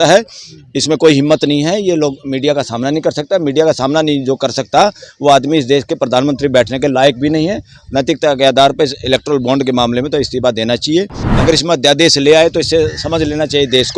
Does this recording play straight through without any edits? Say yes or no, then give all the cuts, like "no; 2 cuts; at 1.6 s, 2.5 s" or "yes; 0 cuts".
no; 1 cut; at 11.2 s